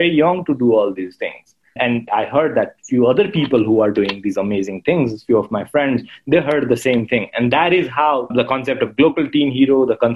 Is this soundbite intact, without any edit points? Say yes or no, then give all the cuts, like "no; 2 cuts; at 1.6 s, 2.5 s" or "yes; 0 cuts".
no; 2 cuts; at 1.9 s, 8.3 s